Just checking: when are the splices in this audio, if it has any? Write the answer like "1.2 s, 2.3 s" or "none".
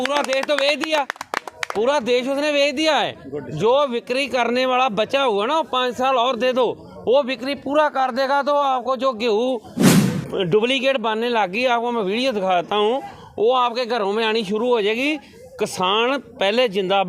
none